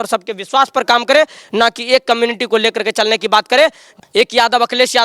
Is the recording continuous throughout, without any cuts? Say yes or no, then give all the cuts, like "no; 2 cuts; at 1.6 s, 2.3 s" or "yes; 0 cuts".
no; 1 cut; at 3.9 s